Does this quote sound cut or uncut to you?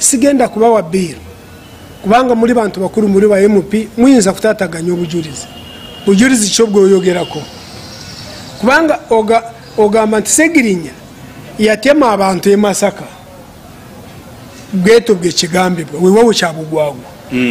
uncut